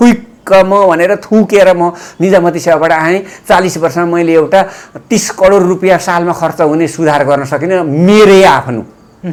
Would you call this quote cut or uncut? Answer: uncut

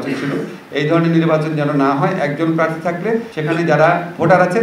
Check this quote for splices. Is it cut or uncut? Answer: cut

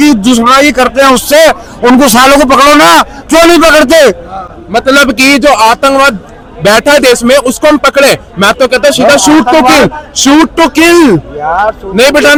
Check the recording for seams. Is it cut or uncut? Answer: uncut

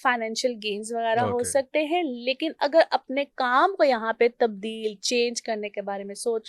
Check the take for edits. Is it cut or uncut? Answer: uncut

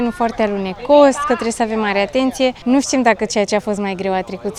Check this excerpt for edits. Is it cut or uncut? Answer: uncut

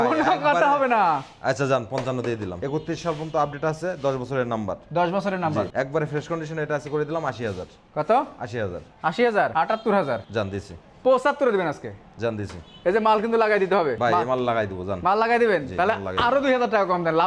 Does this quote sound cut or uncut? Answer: cut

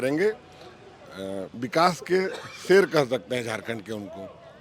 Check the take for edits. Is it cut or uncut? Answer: uncut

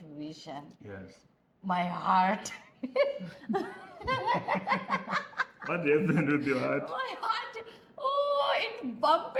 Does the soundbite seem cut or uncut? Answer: uncut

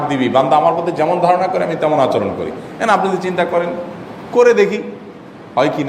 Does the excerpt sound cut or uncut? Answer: uncut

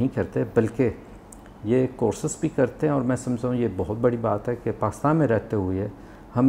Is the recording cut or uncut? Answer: uncut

